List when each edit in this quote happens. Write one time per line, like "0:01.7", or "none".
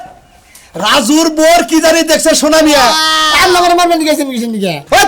0:03.2